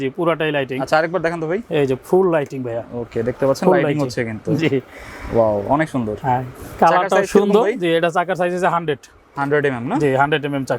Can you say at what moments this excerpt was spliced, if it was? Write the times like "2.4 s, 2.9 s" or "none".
none